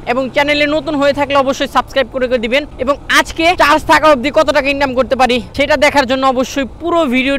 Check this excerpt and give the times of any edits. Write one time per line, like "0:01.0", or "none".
0:03.0
0:05.5